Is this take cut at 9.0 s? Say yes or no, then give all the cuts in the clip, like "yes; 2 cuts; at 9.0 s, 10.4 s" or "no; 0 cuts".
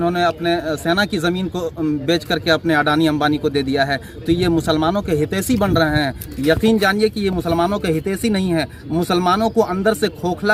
no; 0 cuts